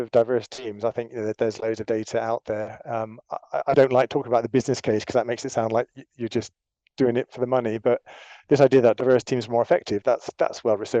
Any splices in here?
no; 0 cuts

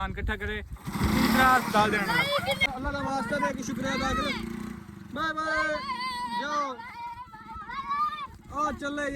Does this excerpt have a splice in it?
yes; 1 cut; at 2.7 s

